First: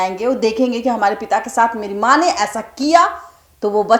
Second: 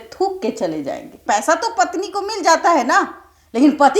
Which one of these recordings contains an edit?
second; 1 cut; at 1.2 s

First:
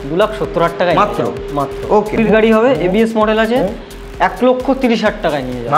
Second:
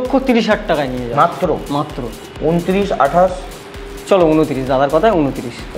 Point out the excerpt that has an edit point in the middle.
first; 1 cut; at 2.2 s

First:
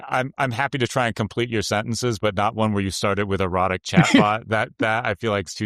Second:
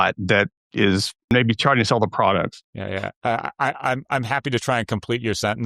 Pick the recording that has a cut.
second; 2 cuts; at 1.3 s, 2.7 s

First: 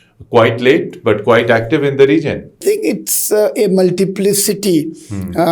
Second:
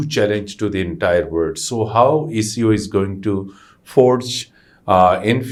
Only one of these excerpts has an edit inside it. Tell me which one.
first; 1 cut; at 2.6 s

